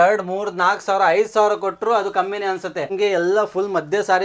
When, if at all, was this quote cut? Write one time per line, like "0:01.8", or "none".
0:02.9